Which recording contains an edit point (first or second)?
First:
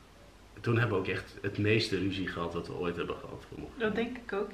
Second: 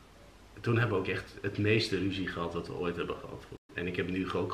second